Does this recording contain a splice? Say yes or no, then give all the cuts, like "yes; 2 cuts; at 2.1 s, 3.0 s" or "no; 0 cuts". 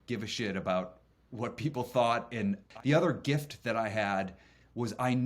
yes; 1 cut; at 2.7 s